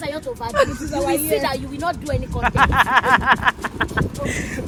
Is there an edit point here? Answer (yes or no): no